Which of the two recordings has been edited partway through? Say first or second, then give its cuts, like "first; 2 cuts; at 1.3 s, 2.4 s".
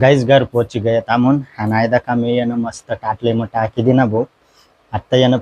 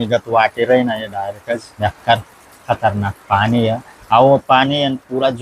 second; 2 cuts; at 1.7 s, 3.9 s